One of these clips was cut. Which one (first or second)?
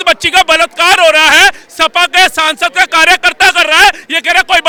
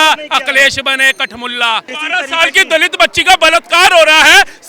second